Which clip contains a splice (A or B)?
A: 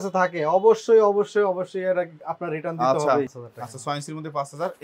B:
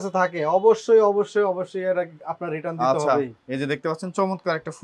A